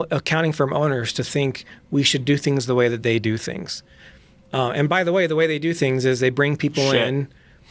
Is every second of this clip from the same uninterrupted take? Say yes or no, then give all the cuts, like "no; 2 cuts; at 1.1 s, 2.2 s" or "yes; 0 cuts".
yes; 0 cuts